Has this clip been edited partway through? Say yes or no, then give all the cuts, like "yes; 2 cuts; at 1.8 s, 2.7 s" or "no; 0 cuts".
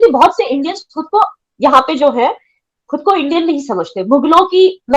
no; 0 cuts